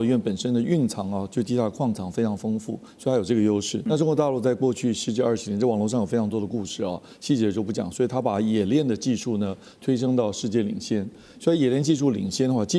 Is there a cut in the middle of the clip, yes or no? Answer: yes